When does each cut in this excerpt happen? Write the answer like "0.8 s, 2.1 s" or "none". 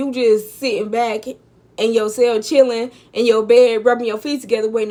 none

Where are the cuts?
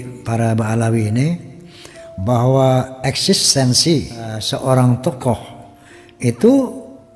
none

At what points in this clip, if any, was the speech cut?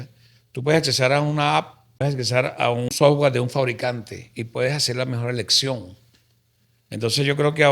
2.0 s, 2.9 s

